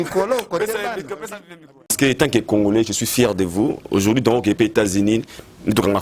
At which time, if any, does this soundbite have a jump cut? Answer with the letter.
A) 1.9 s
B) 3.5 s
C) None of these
A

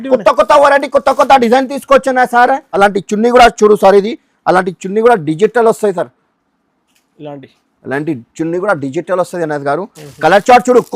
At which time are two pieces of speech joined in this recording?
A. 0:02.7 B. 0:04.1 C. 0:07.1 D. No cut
A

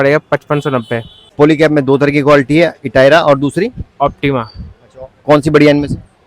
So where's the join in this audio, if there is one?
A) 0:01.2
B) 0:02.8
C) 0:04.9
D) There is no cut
A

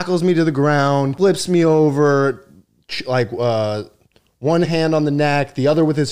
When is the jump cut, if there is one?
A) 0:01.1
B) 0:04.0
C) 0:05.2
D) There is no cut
A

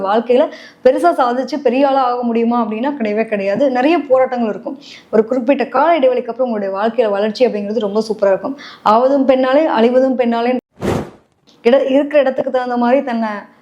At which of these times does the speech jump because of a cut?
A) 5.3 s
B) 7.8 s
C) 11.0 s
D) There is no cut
C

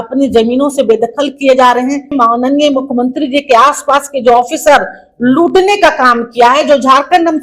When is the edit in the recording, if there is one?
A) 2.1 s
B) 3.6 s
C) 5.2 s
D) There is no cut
A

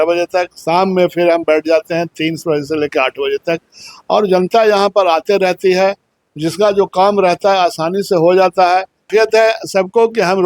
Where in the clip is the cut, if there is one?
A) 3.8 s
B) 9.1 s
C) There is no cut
B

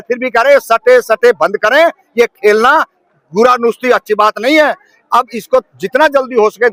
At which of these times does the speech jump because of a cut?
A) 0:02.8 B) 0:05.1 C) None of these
C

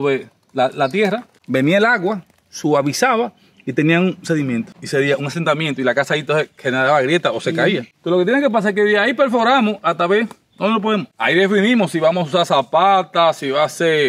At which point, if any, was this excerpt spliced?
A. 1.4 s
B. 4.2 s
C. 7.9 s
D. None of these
D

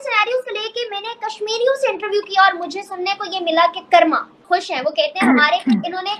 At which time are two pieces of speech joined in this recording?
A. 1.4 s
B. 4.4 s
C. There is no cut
B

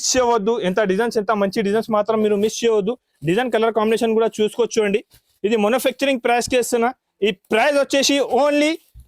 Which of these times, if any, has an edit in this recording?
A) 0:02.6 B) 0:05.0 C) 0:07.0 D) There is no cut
D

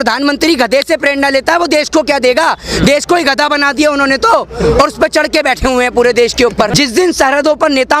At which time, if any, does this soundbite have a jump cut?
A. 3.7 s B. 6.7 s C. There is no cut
B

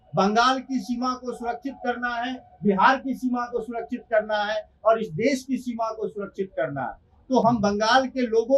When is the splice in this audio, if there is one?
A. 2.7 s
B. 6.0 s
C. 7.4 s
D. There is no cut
D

